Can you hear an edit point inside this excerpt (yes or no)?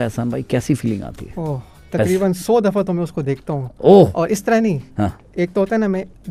no